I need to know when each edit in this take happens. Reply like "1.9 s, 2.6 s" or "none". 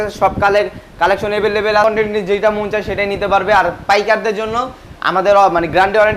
1.8 s